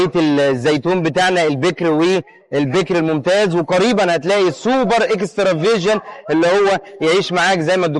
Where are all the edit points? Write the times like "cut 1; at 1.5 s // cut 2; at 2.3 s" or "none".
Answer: none